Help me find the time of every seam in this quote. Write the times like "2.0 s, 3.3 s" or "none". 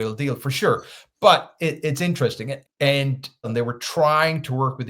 3.5 s